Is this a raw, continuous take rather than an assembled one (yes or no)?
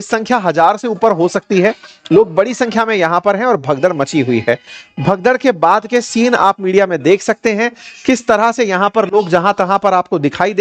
yes